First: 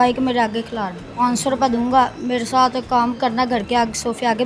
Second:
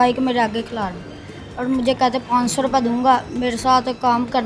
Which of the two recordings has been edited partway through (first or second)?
first